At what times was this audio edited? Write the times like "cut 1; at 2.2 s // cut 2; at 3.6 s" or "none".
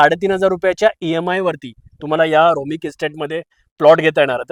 none